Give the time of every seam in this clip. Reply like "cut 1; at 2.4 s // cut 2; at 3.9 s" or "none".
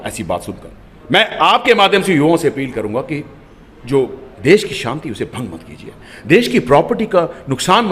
none